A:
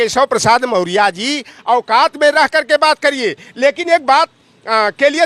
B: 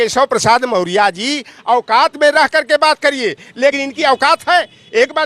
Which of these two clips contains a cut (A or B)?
B